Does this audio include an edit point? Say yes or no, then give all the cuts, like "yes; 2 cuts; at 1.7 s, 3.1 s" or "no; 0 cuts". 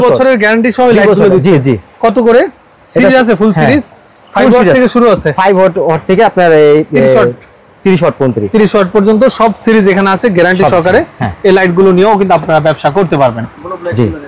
no; 0 cuts